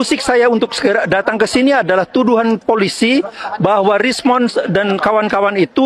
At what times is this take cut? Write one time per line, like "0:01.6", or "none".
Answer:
none